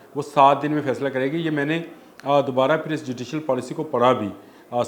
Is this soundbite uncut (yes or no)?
yes